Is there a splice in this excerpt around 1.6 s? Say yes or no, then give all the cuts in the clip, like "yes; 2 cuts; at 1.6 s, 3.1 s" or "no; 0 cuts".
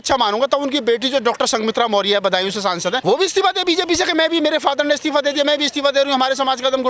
no; 1 cut; at 3.0 s